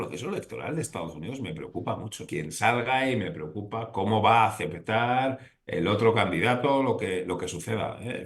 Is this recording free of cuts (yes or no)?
no